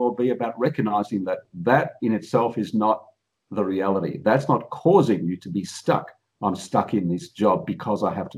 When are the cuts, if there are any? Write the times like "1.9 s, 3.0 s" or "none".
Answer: none